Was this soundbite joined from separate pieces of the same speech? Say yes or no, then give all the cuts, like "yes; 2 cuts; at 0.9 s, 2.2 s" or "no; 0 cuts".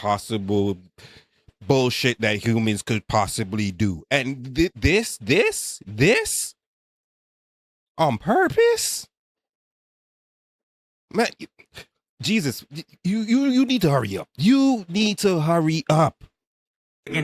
no; 0 cuts